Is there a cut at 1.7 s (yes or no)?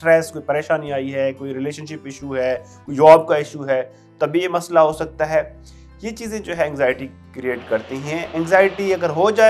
no